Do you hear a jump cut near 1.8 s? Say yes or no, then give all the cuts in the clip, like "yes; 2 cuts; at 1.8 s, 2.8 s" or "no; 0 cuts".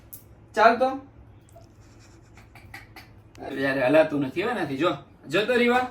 no; 1 cut; at 3.5 s